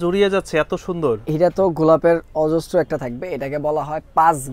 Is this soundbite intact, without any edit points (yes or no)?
yes